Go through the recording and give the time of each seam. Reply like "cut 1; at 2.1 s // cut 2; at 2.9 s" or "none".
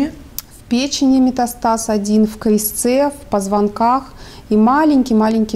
none